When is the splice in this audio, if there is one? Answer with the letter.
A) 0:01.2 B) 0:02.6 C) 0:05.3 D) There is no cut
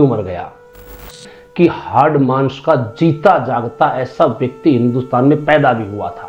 A